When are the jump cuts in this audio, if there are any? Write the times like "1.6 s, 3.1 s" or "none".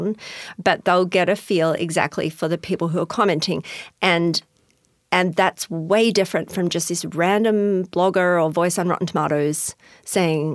none

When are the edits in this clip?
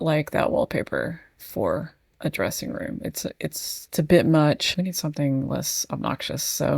none

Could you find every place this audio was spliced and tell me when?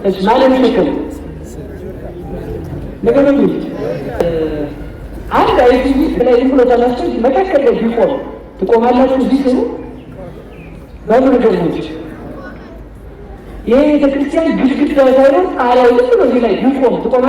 4.2 s

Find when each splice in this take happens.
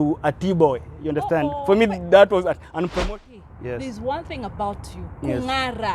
2.9 s

